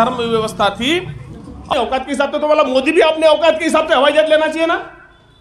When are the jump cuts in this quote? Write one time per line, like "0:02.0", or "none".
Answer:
0:01.7